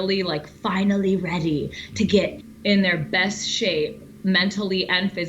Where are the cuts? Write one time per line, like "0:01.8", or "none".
0:02.4